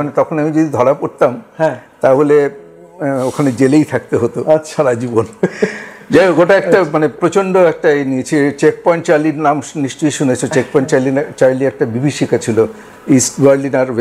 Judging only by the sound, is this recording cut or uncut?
uncut